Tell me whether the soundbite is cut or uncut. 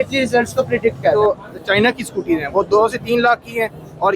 cut